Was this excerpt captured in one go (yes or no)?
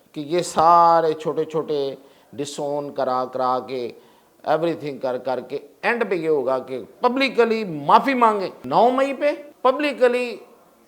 no